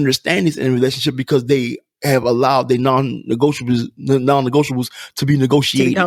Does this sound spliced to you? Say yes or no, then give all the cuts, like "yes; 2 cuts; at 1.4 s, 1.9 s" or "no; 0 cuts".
no; 0 cuts